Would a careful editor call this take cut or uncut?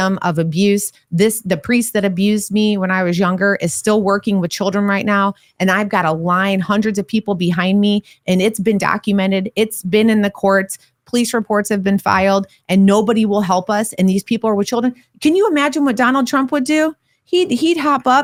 uncut